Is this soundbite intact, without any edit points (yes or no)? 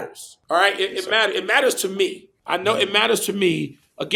yes